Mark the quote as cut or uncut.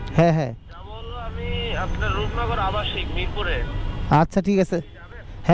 uncut